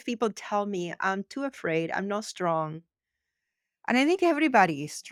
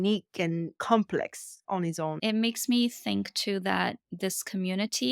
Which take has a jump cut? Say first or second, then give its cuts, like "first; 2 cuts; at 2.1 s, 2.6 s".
second; 1 cut; at 2.2 s